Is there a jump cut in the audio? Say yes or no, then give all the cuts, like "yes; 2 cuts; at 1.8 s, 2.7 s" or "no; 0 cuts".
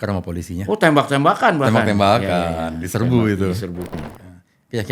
yes; 1 cut; at 3.9 s